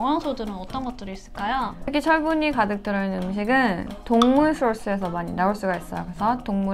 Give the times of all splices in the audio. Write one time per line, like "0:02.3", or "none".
0:01.9